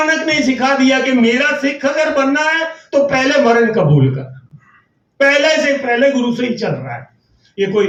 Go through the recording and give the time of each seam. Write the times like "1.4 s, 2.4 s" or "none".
none